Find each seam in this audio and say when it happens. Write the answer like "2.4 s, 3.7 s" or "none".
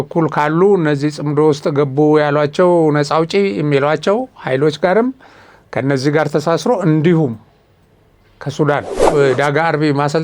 9.0 s